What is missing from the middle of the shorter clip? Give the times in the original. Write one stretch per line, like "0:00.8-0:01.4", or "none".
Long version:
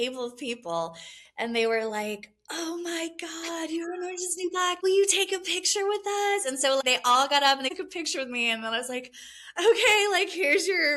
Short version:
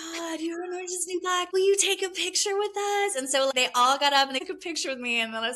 none